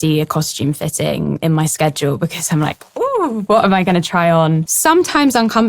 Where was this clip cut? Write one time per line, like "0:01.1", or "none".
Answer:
0:04.7